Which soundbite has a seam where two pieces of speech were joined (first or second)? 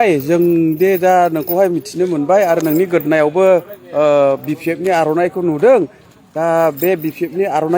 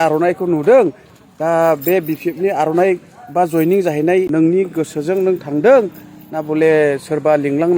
second